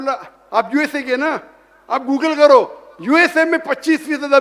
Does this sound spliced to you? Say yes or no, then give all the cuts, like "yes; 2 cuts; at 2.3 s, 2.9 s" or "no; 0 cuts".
no; 0 cuts